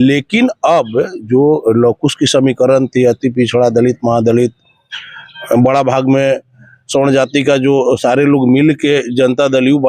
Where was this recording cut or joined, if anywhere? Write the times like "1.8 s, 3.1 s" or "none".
none